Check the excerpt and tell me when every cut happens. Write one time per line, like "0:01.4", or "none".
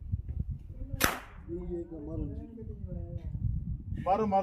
none